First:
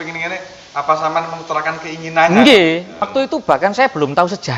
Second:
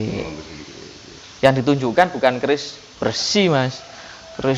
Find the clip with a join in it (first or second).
first